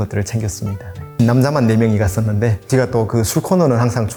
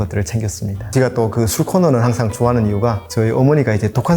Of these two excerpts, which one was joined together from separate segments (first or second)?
second